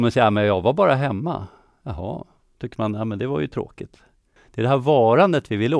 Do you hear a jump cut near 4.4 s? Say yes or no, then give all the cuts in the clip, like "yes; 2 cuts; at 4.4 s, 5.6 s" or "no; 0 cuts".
yes; 1 cut; at 4.4 s